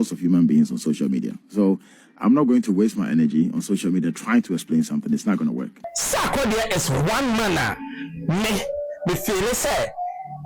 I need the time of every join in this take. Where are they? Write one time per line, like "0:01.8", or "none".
0:05.8